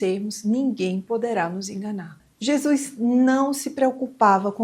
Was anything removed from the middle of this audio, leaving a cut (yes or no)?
yes